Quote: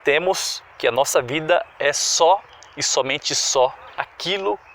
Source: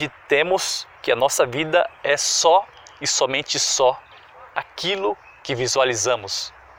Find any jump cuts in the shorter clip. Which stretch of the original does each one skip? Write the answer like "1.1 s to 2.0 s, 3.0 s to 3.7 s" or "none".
4.1 s to 4.4 s